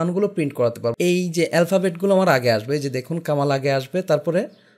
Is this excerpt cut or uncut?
cut